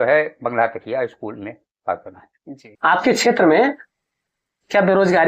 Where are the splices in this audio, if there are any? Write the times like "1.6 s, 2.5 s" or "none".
2.7 s

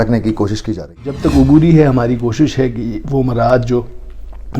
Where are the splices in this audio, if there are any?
1.1 s

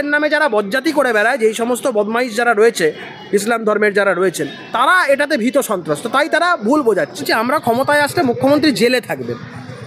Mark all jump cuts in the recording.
7.3 s

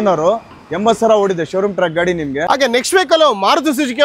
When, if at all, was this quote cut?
2.4 s

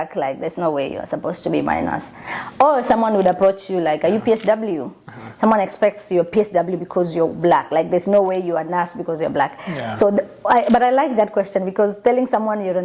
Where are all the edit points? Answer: none

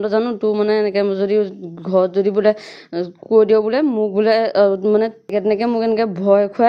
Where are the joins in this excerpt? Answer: 5.3 s

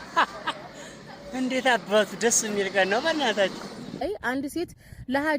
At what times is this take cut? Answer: 4.0 s

